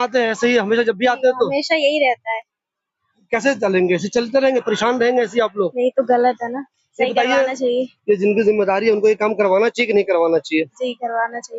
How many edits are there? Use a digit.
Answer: 0